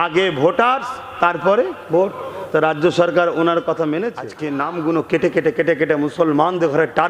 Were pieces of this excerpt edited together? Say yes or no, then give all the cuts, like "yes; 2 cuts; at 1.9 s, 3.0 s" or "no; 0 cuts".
yes; 1 cut; at 4.4 s